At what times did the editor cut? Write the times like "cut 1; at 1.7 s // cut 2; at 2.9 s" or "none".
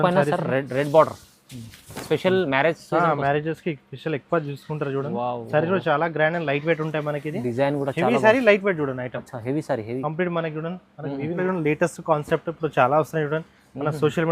cut 1; at 11.4 s